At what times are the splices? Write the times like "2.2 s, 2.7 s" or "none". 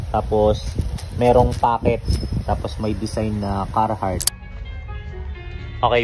4.4 s